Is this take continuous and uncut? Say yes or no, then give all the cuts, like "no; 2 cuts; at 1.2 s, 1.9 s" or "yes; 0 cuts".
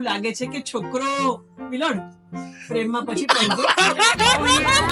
yes; 0 cuts